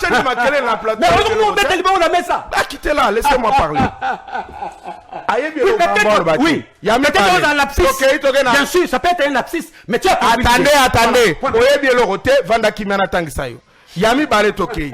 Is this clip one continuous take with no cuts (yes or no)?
yes